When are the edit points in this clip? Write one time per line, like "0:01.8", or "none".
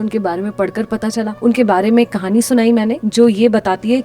0:01.3
0:03.0